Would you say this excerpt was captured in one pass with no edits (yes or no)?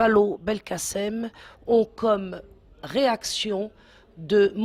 yes